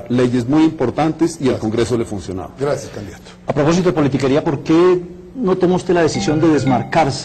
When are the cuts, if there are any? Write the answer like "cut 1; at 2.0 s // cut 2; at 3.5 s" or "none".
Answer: cut 1; at 3.2 s